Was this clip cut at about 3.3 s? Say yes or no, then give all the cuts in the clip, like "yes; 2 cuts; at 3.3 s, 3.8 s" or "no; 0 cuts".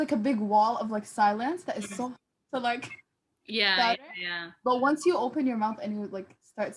no; 0 cuts